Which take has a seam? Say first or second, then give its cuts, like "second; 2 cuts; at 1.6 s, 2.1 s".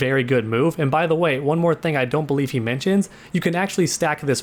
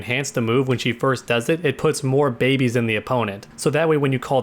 second; 1 cut; at 3.4 s